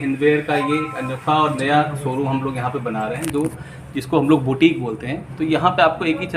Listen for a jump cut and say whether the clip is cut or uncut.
uncut